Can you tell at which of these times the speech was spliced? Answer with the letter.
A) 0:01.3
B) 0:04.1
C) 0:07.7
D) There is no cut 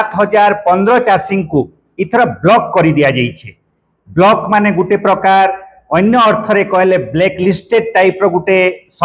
A